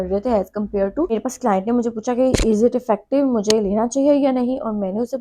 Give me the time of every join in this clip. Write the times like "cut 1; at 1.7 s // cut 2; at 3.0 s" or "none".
cut 1; at 1.1 s